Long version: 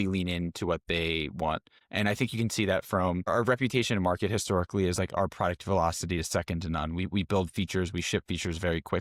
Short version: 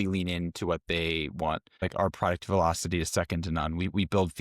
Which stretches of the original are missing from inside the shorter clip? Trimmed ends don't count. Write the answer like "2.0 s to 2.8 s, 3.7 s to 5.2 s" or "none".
1.8 s to 5.0 s

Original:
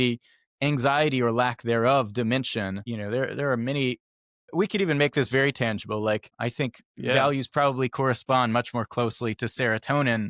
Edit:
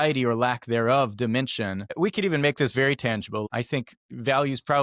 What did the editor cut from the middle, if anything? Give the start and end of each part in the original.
2.8 s to 4.4 s, 6.0 s to 6.3 s

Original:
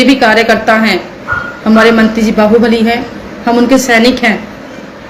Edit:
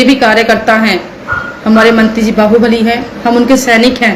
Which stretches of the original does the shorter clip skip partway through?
3.1 s to 3.3 s

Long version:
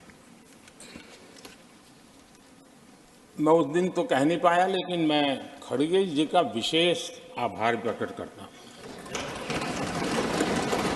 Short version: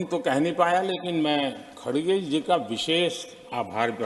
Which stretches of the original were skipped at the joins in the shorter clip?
none

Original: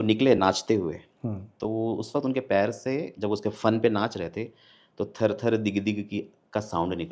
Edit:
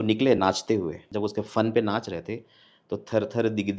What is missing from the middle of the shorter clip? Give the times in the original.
1.0 s to 3.1 s

